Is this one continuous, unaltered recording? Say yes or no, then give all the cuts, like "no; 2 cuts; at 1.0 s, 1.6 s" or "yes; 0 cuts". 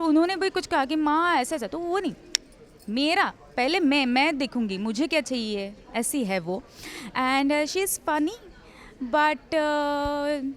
yes; 0 cuts